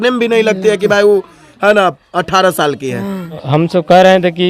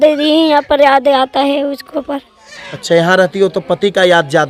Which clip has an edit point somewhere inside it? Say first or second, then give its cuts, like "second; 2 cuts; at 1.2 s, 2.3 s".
first; 1 cut; at 3.4 s